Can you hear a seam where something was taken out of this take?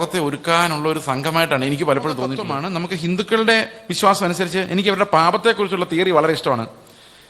yes; 1 cut; at 2.5 s

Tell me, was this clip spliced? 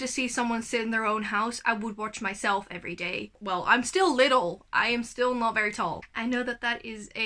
yes; 2 cuts; at 3.4 s, 6.0 s

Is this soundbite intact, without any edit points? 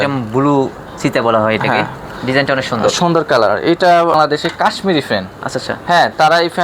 no; 1 cut; at 4.1 s

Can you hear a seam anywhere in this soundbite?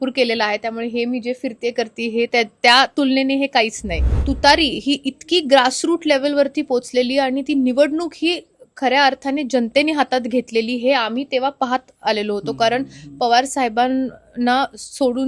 yes; 1 cut; at 4.1 s

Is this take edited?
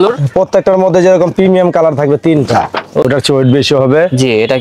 yes; 1 cut; at 3.0 s

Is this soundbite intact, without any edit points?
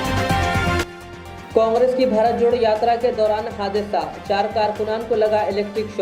no; 1 cut; at 1.0 s

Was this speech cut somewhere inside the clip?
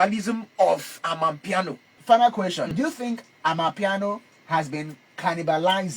yes; 2 cuts; at 2.0 s, 2.7 s

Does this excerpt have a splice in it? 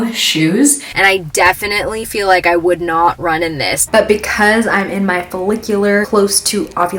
yes; 3 cuts; at 0.8 s, 3.8 s, 6.1 s

